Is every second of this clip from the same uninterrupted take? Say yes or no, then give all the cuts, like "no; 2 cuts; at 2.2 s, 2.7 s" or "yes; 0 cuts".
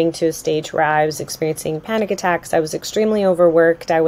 yes; 0 cuts